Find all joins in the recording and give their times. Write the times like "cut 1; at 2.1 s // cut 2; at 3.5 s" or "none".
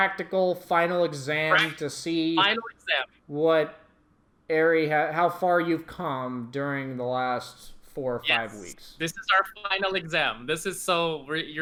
none